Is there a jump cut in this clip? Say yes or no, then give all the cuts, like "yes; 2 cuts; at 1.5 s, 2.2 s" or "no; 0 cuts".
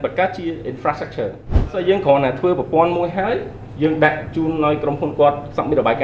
yes; 1 cut; at 1.7 s